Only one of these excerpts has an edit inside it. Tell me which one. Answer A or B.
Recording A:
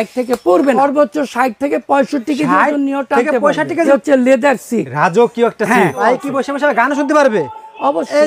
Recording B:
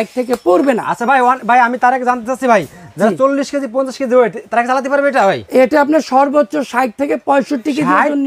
A